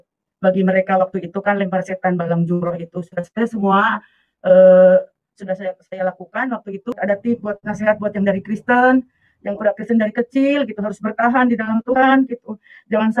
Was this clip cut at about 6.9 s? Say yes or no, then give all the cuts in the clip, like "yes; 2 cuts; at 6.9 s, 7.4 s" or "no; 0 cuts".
yes; 1 cut; at 6.9 s